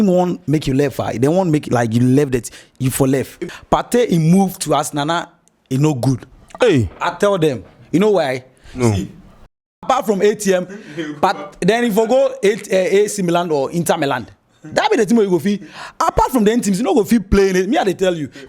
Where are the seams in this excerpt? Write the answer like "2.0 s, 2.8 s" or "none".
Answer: 3.4 s, 9.6 s